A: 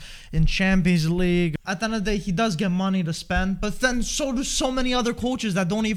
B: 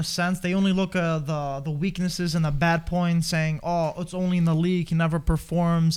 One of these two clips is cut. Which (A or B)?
A